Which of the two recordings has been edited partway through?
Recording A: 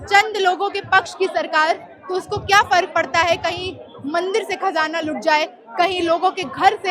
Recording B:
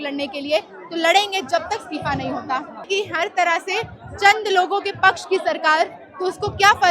B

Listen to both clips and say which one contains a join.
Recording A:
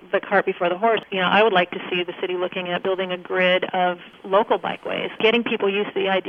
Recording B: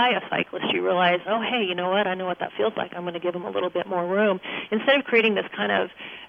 A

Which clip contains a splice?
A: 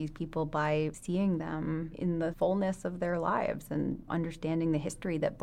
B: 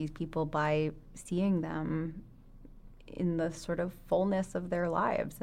A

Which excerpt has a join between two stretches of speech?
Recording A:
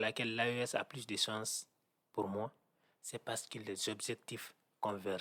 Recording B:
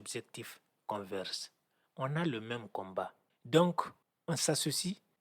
B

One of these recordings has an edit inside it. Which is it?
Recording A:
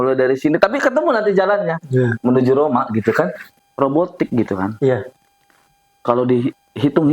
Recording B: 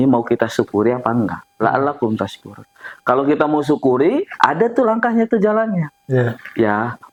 A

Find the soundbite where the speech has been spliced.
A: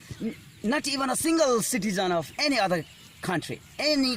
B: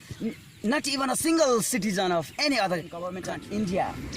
B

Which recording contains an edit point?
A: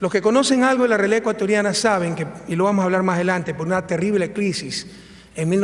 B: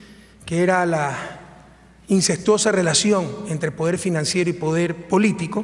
A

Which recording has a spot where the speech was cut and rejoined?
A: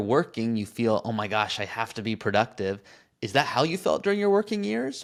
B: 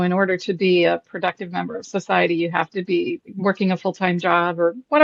B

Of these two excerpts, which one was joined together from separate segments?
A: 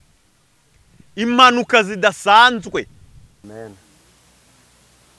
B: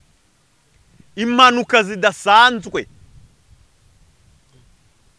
A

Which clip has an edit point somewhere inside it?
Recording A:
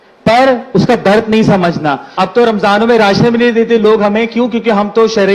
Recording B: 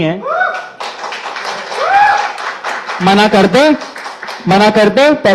A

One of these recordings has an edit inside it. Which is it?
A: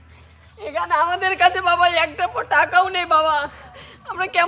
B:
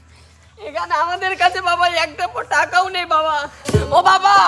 B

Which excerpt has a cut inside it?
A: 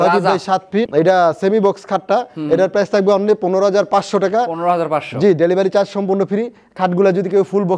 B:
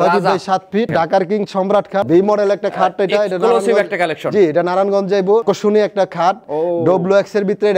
B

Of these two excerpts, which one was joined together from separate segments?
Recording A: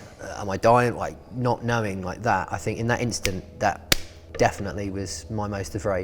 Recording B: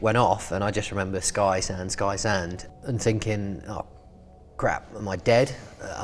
A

